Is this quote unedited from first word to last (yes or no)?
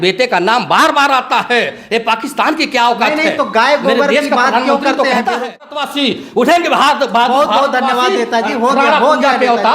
no